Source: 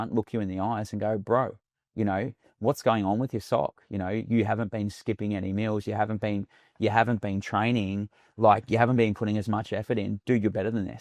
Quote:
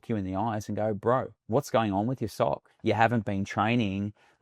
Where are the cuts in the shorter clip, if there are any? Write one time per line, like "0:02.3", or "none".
0:01.4
0:02.7